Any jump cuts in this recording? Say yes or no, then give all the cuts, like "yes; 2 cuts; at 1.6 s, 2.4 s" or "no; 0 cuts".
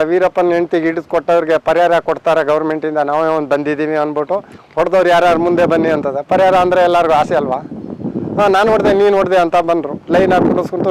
no; 0 cuts